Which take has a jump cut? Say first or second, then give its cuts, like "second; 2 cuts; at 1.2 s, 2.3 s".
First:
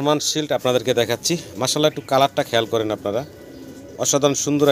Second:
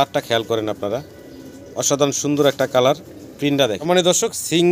second; 1 cut; at 3.8 s